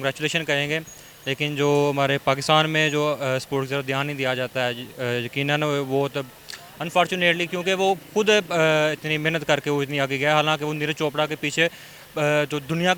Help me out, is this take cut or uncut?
uncut